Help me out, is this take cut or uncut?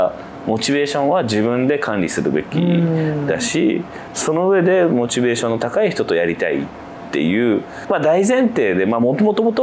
uncut